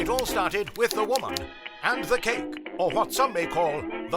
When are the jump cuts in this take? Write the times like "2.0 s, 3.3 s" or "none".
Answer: none